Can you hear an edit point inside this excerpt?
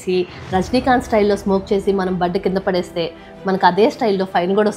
no; 0 cuts

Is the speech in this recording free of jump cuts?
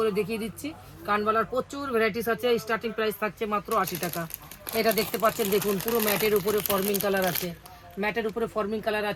yes; 0 cuts

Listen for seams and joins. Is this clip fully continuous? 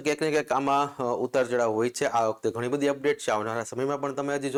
yes; 0 cuts

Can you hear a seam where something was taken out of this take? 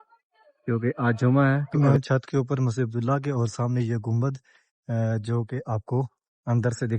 yes; 1 cut; at 1.7 s

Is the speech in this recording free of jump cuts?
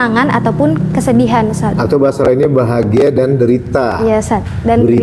yes; 0 cuts

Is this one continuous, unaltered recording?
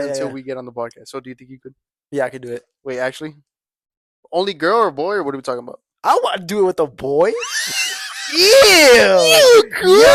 yes; 0 cuts

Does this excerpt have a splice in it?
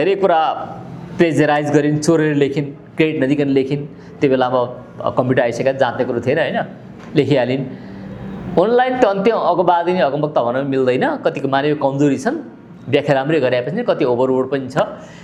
no; 0 cuts

